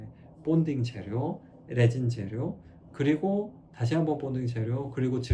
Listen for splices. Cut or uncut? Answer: uncut